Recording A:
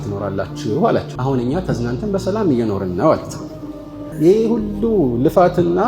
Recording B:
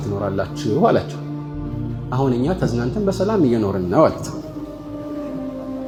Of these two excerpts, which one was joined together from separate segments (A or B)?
A